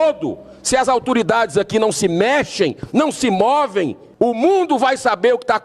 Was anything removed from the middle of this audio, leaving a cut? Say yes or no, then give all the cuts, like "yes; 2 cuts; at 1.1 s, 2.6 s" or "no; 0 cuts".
yes; 1 cut; at 4.0 s